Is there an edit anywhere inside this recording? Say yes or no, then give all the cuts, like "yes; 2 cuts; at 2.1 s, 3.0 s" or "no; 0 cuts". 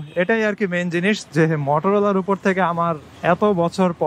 no; 0 cuts